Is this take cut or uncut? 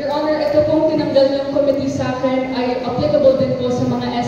uncut